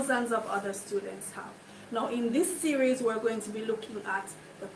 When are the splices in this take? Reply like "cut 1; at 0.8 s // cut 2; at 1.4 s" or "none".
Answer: none